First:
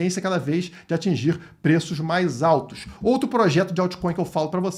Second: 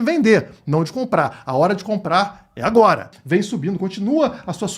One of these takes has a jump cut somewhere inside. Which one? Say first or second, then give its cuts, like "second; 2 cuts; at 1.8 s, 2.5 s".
second; 1 cut; at 3.1 s